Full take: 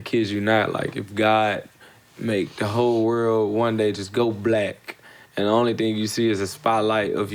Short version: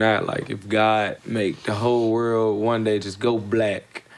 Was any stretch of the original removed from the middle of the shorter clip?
yes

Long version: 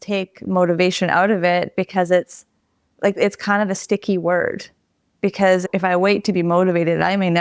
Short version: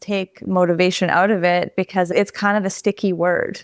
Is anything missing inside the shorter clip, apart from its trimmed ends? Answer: yes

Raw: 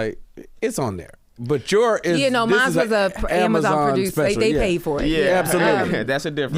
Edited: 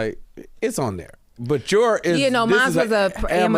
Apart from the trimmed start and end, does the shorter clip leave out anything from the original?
no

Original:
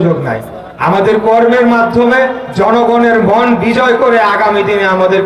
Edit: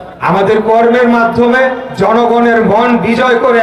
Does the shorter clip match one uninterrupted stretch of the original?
yes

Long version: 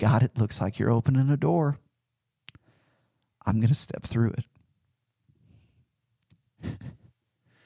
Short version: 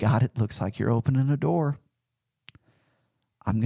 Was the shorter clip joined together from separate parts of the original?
no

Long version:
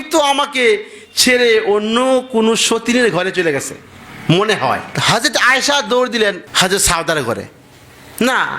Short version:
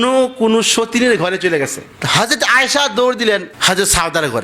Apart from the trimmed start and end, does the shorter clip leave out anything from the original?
yes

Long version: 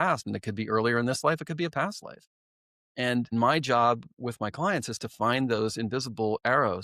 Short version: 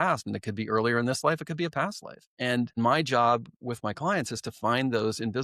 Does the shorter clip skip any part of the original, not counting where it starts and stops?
yes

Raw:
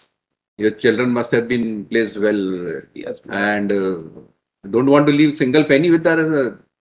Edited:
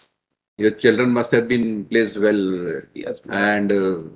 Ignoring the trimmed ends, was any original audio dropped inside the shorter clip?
no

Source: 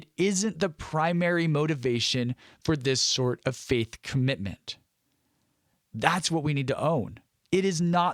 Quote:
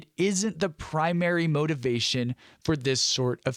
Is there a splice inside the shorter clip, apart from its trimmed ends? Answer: no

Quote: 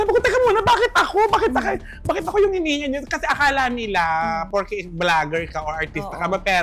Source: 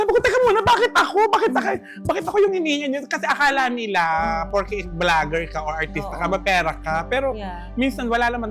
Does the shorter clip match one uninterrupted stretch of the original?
yes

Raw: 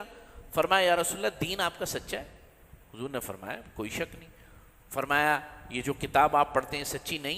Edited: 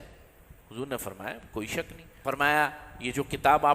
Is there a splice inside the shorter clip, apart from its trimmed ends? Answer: yes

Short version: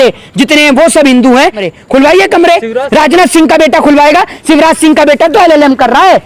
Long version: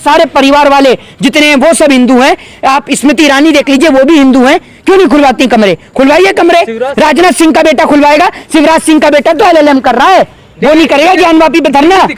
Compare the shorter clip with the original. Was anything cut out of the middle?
yes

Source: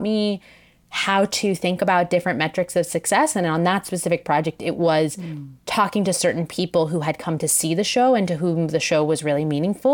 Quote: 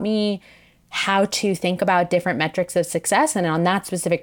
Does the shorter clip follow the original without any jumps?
yes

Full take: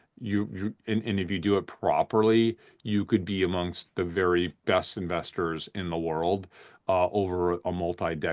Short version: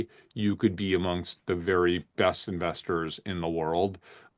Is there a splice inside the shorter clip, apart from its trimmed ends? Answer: no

